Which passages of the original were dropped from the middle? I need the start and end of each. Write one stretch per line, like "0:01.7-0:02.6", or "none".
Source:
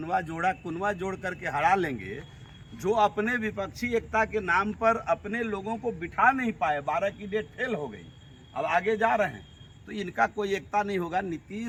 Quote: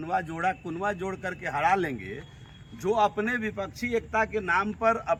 none